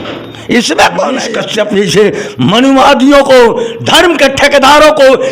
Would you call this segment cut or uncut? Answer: cut